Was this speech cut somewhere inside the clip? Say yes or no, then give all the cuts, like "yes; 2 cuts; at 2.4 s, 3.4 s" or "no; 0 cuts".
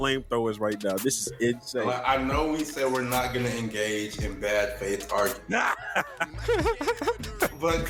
no; 0 cuts